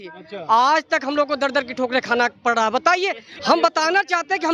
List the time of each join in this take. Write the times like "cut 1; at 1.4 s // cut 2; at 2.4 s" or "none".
cut 1; at 3.3 s

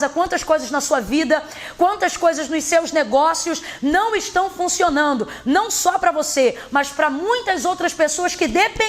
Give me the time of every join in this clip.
none

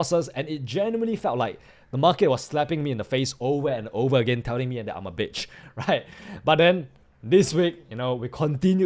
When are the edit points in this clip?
none

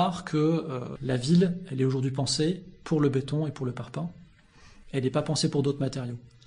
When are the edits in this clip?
cut 1; at 0.9 s

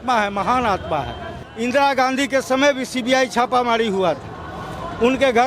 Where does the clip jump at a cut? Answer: cut 1; at 1.4 s

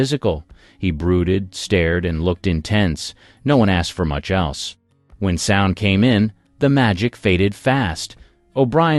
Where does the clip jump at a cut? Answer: none

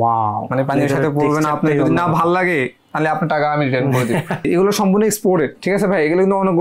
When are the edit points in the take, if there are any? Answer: cut 1; at 4.4 s

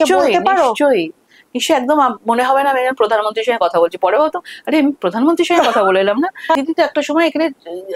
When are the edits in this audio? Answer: cut 1; at 6.5 s

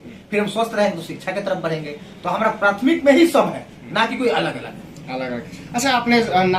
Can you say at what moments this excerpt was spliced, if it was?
none

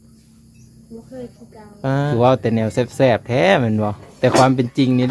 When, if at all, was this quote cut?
cut 1; at 2.1 s // cut 2; at 4.0 s

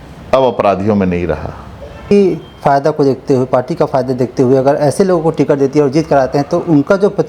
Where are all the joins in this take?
cut 1; at 2.1 s

